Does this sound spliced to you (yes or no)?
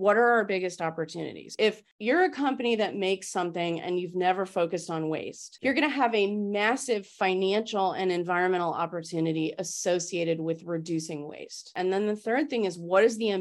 no